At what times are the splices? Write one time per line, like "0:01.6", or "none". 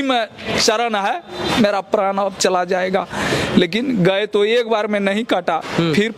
none